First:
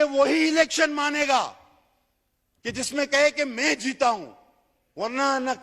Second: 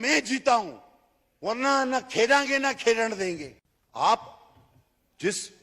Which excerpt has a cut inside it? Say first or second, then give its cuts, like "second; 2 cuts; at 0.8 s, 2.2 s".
second; 1 cut; at 3.5 s